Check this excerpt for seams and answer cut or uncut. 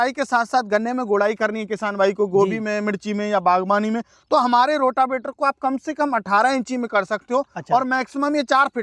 uncut